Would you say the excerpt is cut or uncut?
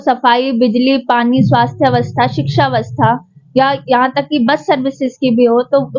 uncut